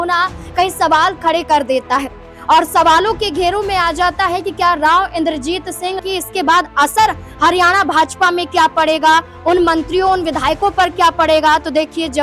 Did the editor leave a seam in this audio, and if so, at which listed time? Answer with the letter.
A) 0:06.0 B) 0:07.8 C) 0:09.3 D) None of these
A